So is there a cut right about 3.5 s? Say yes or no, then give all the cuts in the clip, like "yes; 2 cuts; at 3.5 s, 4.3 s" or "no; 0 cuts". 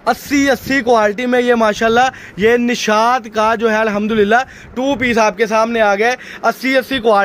no; 0 cuts